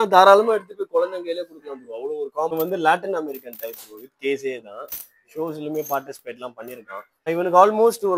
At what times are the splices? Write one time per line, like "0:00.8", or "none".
0:02.5
0:07.3